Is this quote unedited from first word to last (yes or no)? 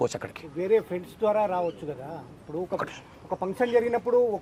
yes